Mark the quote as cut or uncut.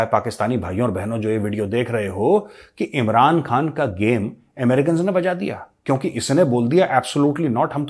uncut